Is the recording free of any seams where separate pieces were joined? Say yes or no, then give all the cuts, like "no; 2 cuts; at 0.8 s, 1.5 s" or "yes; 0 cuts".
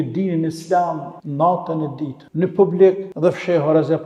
no; 3 cuts; at 1.2 s, 2.2 s, 3.1 s